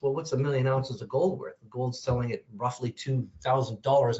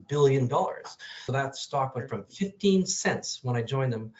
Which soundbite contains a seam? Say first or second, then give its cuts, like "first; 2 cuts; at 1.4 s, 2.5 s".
second; 1 cut; at 1.1 s